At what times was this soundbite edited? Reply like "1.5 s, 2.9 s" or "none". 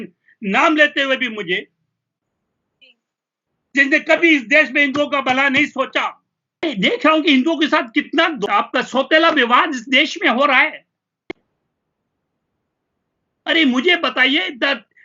6.6 s